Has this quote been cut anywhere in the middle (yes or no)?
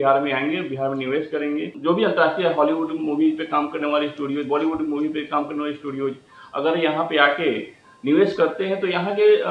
yes